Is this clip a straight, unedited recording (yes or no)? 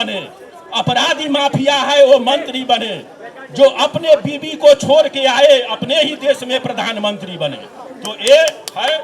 yes